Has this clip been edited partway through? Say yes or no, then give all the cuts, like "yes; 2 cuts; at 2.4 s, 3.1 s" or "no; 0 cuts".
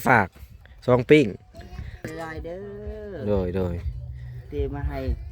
yes; 1 cut; at 2.1 s